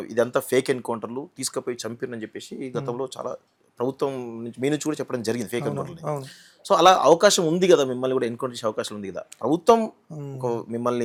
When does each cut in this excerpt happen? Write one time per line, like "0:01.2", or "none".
none